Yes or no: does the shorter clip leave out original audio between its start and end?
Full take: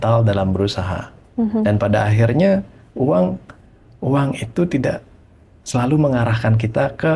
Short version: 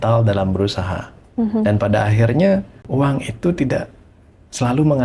yes